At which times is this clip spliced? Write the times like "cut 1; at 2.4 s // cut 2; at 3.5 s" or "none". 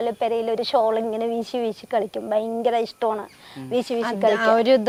none